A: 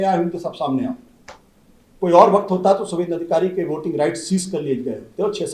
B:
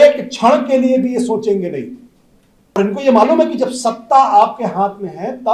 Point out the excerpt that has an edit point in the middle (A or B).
B